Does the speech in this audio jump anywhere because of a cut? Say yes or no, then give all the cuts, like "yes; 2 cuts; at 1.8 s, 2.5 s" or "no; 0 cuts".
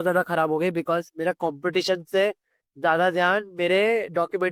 no; 0 cuts